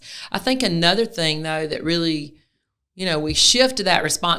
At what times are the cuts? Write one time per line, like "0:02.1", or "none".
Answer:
none